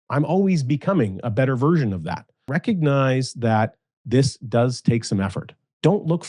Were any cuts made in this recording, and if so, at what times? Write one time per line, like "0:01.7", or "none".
0:02.5